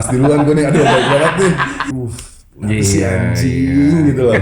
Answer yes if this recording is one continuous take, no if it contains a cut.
no